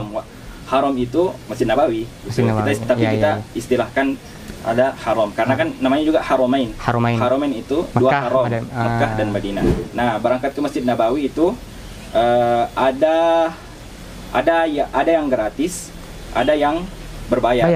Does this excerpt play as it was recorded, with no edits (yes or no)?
no